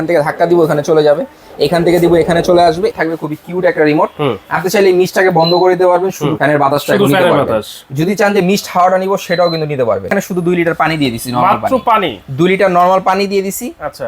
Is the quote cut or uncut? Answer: cut